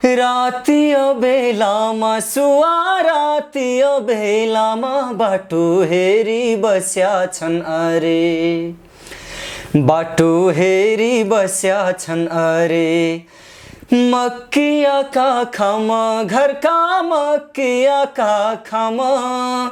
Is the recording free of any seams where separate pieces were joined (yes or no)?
yes